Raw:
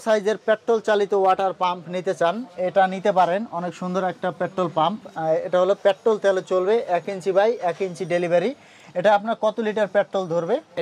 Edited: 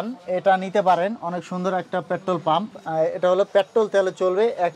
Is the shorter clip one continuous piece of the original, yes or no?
yes